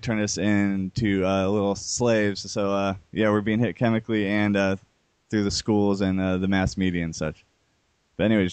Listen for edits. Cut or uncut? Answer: uncut